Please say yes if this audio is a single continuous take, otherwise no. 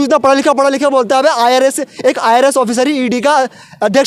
yes